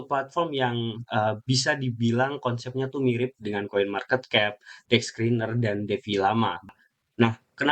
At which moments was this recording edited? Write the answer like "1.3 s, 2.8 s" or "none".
6.7 s